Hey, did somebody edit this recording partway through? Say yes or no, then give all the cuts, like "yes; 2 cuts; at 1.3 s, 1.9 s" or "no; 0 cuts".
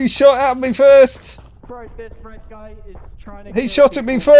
yes; 1 cut; at 3.1 s